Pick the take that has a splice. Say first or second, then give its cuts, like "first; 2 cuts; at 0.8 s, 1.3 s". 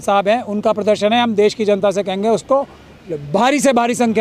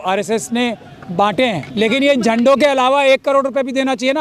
second; 1 cut; at 1.7 s